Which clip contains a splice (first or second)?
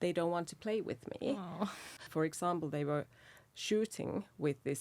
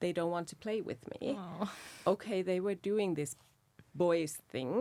first